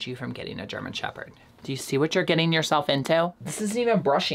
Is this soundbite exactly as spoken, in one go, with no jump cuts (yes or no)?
no